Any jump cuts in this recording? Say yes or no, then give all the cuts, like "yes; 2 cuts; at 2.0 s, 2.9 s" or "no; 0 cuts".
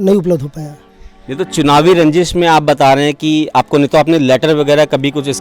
no; 0 cuts